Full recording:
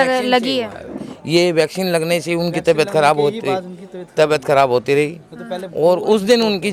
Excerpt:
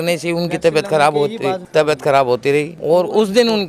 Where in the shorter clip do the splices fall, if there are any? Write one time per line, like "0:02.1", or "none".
0:01.6
0:02.7